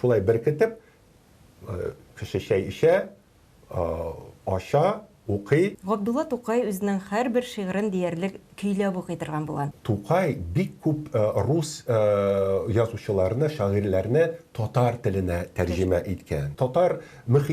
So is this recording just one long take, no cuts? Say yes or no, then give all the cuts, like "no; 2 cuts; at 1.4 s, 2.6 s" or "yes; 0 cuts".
no; 3 cuts; at 5.8 s, 9.8 s, 16.5 s